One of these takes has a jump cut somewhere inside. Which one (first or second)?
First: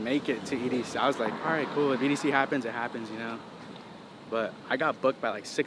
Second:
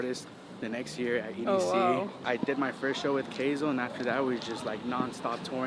second